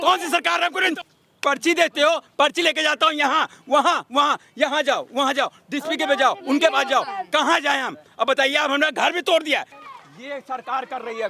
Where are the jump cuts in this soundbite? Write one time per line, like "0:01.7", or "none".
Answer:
0:00.9
0:09.8

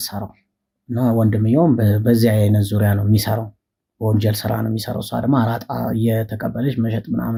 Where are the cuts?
none

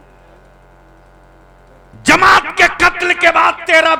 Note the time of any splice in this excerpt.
none

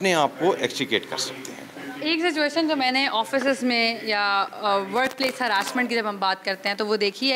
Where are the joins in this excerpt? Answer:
none

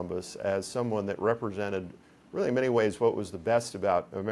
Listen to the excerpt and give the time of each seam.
none

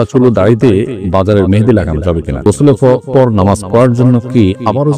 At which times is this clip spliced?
0:01.0
0:02.4

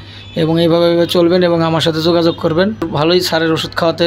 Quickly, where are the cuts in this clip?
0:02.9

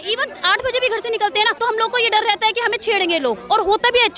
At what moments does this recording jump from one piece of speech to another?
0:01.5

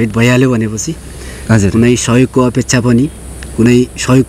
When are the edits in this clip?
none

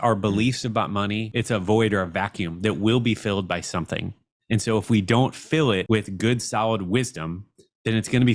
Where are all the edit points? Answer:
0:01.3
0:05.8

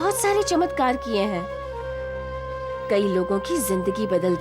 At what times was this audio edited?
none

